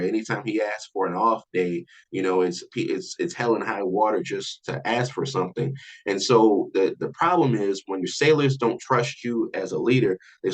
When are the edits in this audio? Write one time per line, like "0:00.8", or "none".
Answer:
0:04.6